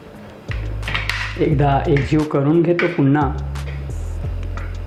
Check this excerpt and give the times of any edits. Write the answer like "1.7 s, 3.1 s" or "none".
none